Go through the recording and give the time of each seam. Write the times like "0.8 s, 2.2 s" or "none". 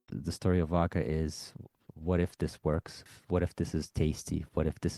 1.9 s, 3.1 s